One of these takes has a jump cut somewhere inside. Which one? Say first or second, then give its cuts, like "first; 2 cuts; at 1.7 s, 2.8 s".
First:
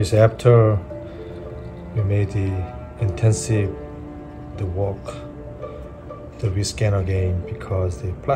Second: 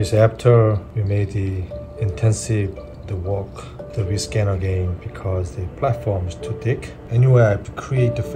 second; 4 cuts; at 0.9 s, 2.9 s, 3.8 s, 7.0 s